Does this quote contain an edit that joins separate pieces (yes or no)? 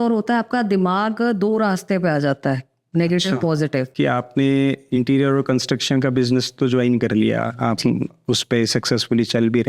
yes